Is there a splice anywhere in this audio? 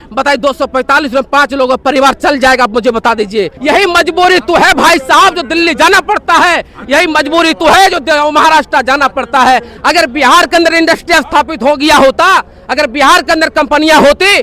yes; 2 cuts; at 3.6 s, 9.7 s

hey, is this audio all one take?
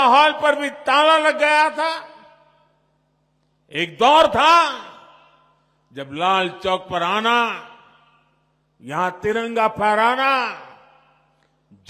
yes; 0 cuts

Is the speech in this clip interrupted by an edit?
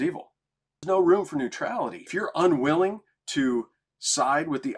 yes; 2 cuts; at 0.8 s, 2.1 s

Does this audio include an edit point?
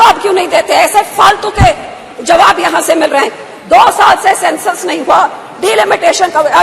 no; 0 cuts

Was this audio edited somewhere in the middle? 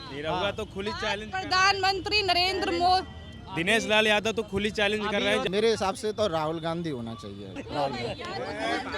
yes; 2 cuts; at 5.4 s, 7.6 s

